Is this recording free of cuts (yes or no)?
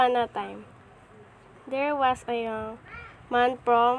yes